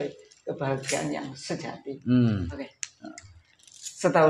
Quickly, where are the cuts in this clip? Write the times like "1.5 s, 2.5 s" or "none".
2.6 s